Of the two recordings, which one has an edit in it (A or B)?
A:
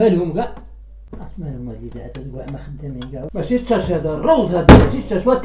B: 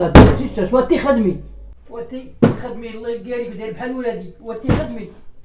A